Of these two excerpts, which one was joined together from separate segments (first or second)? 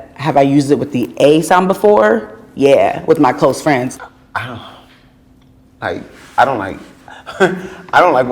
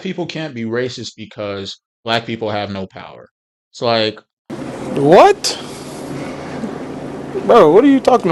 first